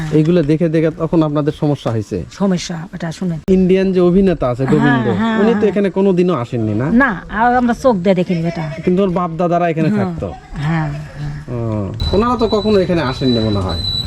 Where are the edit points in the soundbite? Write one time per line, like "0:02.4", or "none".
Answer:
0:03.4
0:12.0